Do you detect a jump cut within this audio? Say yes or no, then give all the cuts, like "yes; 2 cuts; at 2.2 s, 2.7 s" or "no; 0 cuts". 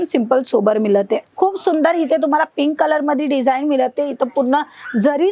yes; 1 cut; at 1.2 s